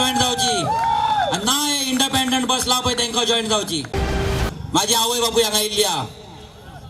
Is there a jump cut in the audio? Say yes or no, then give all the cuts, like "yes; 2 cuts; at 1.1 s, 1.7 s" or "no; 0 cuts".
yes; 1 cut; at 4.0 s